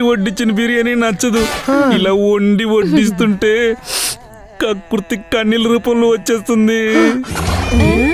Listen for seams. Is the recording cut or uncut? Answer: uncut